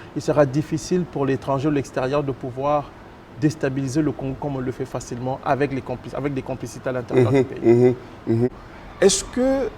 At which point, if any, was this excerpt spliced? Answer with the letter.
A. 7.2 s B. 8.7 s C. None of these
B